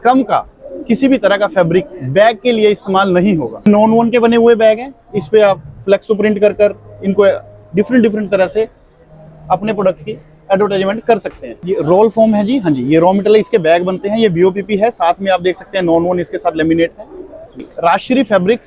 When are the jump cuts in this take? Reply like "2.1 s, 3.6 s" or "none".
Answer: 3.7 s, 11.6 s, 17.7 s